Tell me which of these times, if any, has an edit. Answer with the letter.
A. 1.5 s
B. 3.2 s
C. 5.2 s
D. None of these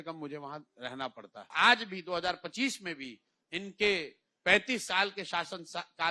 A